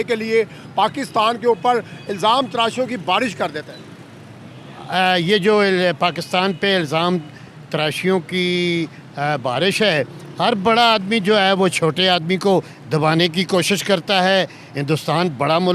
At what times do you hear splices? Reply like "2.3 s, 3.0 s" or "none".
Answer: none